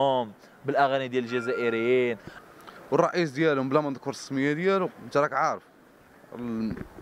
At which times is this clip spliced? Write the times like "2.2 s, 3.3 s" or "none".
2.3 s